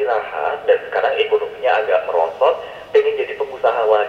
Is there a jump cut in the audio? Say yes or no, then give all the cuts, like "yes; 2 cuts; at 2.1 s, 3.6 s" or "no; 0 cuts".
no; 0 cuts